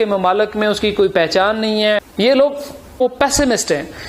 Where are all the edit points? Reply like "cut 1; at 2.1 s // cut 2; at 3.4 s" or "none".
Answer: cut 1; at 2.1 s // cut 2; at 3.0 s